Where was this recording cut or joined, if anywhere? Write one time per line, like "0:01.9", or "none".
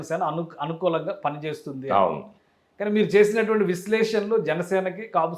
none